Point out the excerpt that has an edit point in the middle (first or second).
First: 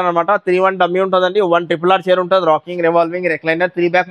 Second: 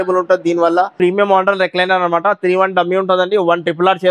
second